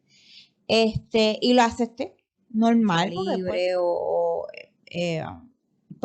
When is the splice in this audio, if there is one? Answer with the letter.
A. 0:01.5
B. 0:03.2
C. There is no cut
B